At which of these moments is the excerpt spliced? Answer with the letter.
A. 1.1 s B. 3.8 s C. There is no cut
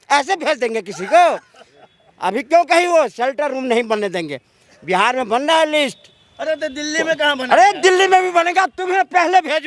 C